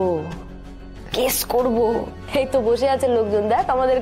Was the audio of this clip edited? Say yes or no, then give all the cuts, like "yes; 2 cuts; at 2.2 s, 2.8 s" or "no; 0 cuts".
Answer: yes; 1 cut; at 2.2 s